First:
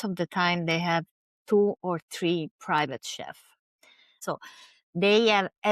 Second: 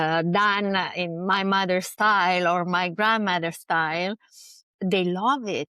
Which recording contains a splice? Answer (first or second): first